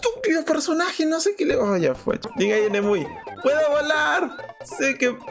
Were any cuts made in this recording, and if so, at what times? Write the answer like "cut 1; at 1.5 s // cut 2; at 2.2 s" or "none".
cut 1; at 2.3 s